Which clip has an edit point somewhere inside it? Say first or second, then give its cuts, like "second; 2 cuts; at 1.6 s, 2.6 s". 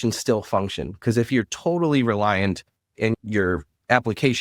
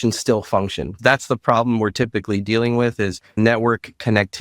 second; 2 cuts; at 1.0 s, 3.4 s